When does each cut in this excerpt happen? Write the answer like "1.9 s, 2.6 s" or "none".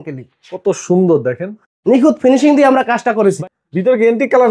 3.4 s